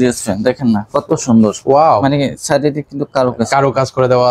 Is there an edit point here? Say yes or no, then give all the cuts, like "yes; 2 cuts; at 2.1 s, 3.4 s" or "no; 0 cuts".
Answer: no; 0 cuts